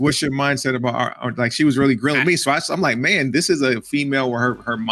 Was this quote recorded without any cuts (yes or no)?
yes